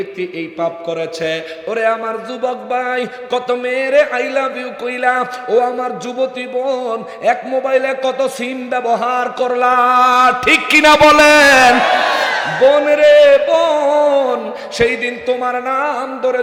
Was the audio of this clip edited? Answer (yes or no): no